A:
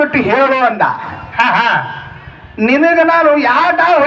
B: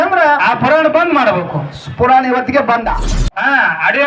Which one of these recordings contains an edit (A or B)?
B